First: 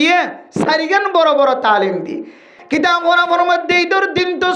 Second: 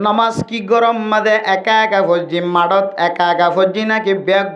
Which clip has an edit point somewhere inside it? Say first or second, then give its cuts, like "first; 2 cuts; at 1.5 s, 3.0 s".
first; 1 cut; at 2.6 s